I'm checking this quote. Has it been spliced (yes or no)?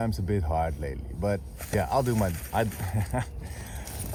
no